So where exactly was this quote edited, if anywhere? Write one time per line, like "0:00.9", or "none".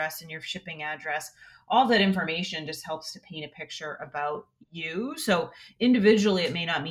none